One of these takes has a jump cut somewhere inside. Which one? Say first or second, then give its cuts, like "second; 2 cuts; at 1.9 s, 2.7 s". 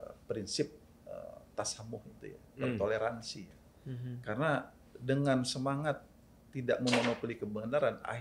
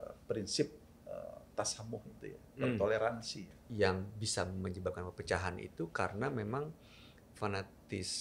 second; 1 cut; at 3.7 s